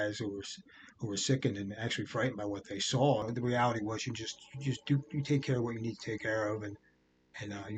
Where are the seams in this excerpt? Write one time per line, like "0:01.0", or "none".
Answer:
0:03.2